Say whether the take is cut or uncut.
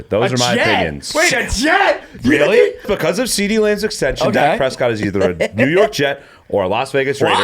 cut